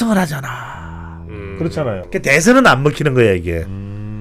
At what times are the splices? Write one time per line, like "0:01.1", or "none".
0:02.0